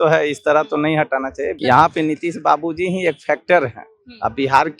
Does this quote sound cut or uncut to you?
cut